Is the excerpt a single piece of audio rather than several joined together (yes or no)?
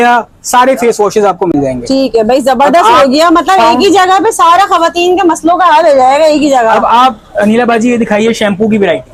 yes